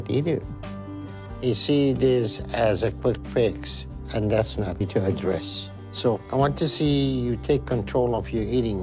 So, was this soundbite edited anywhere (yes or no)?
no